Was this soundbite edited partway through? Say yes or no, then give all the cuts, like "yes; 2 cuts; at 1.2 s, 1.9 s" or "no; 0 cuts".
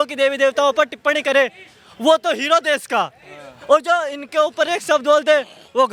no; 0 cuts